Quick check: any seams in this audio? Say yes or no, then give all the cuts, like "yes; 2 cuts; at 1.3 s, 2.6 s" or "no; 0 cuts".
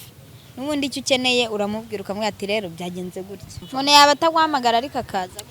yes; 1 cut; at 3.6 s